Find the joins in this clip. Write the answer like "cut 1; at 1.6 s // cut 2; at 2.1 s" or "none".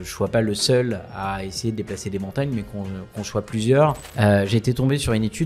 cut 1; at 4.1 s